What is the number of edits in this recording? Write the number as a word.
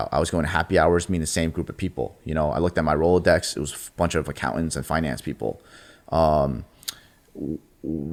zero